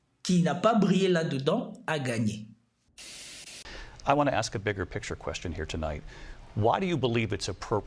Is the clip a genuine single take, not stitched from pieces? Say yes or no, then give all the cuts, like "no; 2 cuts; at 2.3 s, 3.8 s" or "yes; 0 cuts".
no; 1 cut; at 3.3 s